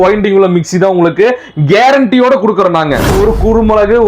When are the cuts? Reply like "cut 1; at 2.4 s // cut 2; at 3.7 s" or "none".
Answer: cut 1; at 3.1 s